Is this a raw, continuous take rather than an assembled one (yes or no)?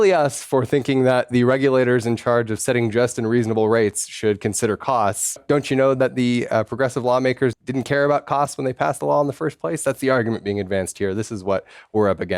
no